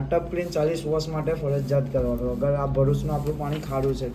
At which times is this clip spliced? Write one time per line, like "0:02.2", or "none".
none

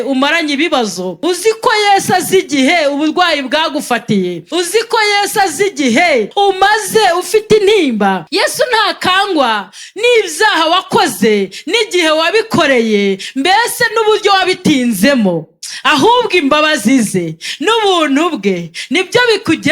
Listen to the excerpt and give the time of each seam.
0:01.1
0:04.4
0:06.3
0:08.3

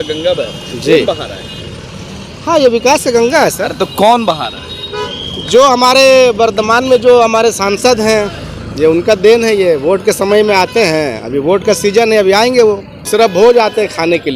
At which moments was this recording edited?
0:13.1

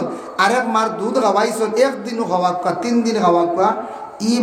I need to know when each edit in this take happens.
none

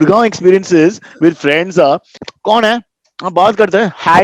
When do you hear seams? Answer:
0:02.2

